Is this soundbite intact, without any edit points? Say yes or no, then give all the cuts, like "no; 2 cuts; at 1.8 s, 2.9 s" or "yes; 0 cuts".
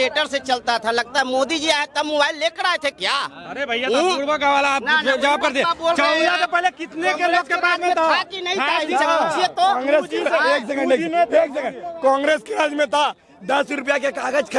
yes; 0 cuts